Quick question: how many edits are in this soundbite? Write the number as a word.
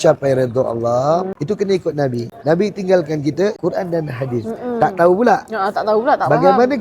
three